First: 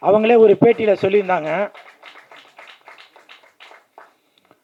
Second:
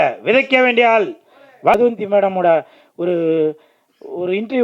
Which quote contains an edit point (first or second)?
second